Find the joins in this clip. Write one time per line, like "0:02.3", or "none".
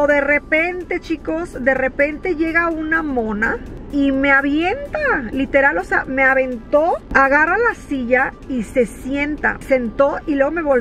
0:03.9
0:07.1
0:09.6